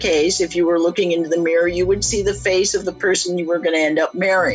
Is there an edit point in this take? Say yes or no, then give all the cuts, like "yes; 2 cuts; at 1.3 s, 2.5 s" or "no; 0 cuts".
no; 0 cuts